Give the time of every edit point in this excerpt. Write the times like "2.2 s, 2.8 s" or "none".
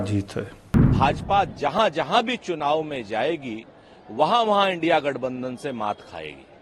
0.9 s